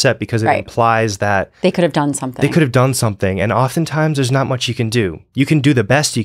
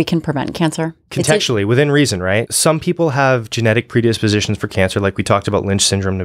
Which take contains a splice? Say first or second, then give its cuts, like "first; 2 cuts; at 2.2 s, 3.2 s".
second; 2 cuts; at 1.0 s, 2.5 s